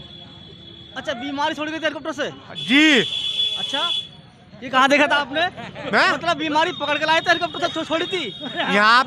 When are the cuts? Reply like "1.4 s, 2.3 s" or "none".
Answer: none